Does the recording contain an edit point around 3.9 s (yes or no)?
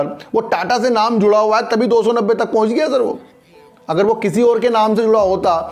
no